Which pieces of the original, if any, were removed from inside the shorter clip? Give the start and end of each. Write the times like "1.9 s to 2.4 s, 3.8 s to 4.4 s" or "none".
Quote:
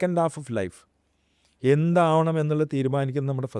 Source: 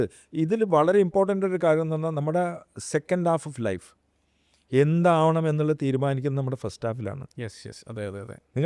none